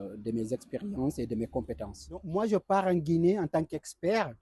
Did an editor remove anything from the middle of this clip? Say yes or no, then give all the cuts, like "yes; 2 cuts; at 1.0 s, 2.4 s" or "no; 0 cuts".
yes; 1 cut; at 2.3 s